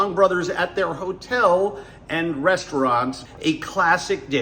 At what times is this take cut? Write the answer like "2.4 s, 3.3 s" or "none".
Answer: 3.2 s